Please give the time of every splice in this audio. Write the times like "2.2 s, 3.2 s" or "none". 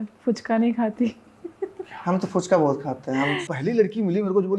3.5 s